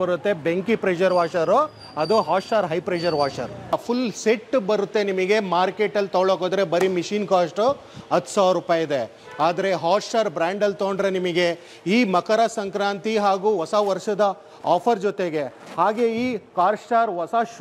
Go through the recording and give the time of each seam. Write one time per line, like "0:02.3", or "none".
0:03.7